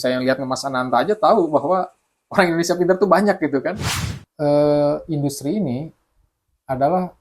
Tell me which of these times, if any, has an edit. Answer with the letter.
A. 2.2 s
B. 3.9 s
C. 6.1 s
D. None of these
B